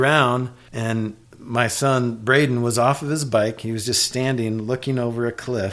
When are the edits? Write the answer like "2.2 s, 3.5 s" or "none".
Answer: 1.0 s